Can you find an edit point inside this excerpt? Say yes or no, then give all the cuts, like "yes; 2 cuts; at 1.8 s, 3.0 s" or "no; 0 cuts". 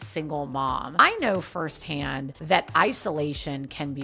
no; 0 cuts